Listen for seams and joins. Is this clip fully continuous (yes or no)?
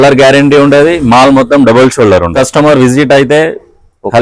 no